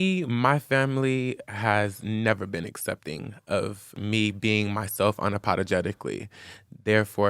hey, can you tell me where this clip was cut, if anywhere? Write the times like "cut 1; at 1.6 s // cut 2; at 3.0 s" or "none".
cut 1; at 1.4 s // cut 2; at 4.0 s